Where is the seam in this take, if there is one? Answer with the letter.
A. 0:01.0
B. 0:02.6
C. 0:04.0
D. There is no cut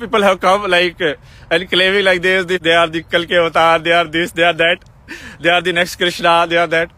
B